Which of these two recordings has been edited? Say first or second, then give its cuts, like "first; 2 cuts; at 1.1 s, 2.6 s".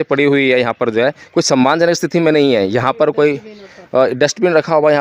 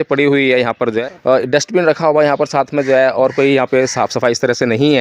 second; 1 cut; at 1.1 s